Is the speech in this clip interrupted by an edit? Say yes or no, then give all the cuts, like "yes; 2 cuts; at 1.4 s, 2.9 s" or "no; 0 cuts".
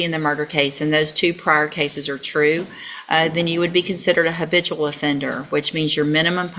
no; 0 cuts